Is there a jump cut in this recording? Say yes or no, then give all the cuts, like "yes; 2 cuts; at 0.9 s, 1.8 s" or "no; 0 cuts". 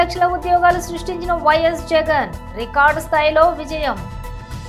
no; 0 cuts